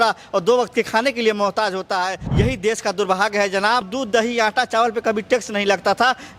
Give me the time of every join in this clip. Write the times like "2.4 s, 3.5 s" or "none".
2.2 s, 3.9 s